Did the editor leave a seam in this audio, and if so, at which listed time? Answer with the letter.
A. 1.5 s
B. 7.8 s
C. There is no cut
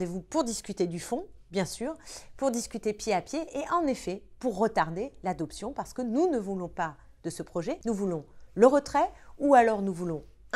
B